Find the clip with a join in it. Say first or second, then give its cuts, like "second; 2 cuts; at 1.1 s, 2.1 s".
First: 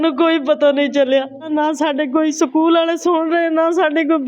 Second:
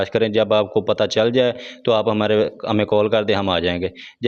first; 1 cut; at 1.4 s